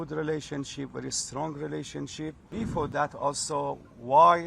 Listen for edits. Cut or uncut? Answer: cut